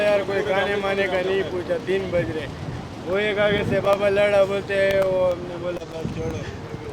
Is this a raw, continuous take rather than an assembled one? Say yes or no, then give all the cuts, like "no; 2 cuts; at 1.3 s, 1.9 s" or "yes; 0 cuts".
yes; 0 cuts